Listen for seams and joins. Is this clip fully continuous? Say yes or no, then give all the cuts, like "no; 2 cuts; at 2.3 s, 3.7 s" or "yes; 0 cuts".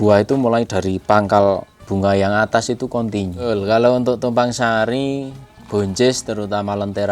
no; 2 cuts; at 1.8 s, 3.5 s